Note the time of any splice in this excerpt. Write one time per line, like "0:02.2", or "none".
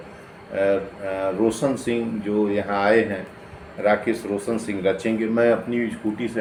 none